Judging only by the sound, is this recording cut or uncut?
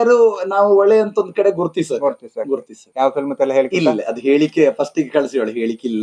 cut